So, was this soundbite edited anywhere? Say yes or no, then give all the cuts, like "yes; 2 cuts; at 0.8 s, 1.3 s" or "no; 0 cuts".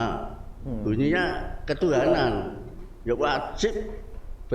no; 0 cuts